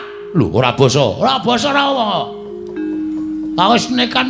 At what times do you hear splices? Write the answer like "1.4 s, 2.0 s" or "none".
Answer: none

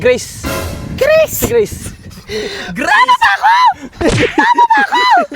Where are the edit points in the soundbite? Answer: none

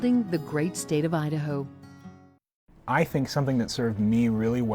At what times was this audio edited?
2.7 s

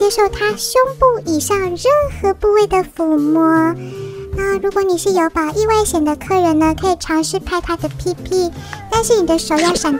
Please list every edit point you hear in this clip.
none

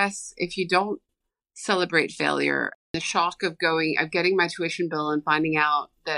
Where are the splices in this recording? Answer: 2.9 s

